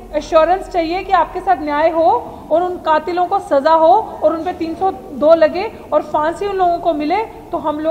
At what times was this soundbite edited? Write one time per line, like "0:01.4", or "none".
none